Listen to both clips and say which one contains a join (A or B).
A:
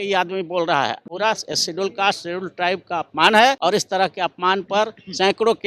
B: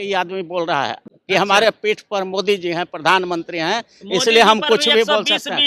A